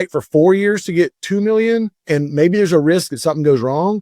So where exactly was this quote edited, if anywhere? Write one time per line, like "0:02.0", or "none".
0:02.0